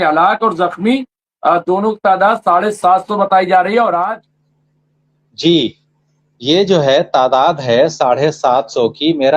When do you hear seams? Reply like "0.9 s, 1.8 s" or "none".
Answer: 4.1 s